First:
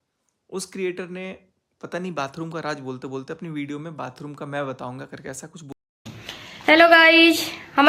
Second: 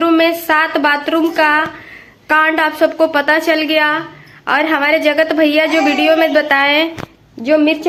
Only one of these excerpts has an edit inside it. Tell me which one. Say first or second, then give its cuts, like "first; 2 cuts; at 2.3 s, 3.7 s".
first; 1 cut; at 5.7 s